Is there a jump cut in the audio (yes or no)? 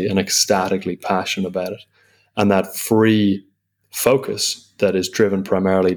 no